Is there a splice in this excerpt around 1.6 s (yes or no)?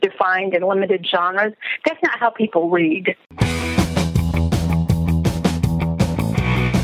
no